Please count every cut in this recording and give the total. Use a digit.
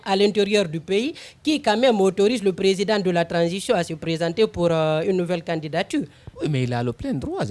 0